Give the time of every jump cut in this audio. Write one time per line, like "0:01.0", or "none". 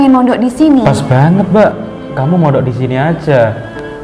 0:01.0